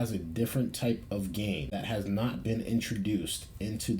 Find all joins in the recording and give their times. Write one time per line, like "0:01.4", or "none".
0:01.7